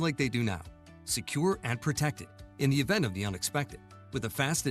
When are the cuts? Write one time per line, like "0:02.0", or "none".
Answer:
none